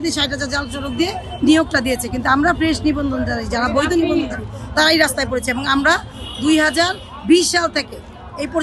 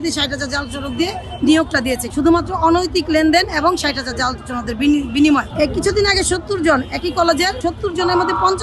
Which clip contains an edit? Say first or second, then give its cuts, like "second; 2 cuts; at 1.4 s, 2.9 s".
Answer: second; 3 cuts; at 2.0 s, 5.5 s, 7.6 s